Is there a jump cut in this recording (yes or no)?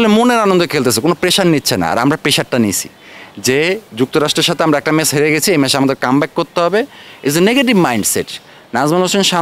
no